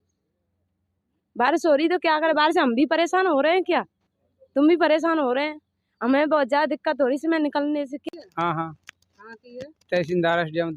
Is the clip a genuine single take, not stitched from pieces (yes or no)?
no